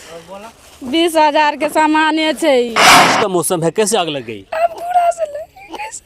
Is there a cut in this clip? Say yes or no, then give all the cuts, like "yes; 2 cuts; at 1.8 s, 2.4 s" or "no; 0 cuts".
yes; 1 cut; at 3.1 s